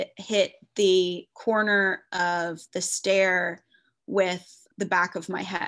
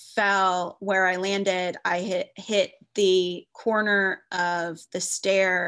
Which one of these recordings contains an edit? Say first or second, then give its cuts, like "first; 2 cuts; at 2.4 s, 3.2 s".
first; 1 cut; at 4.6 s